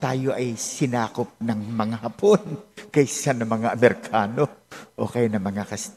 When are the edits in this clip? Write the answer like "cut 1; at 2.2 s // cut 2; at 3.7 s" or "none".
none